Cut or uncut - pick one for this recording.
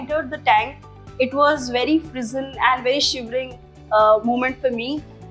uncut